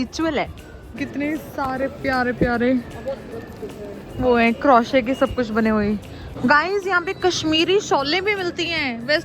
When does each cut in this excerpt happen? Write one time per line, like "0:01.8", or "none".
0:01.0
0:06.3